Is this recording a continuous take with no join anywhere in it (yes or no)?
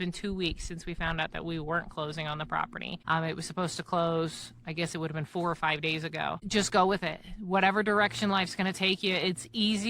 no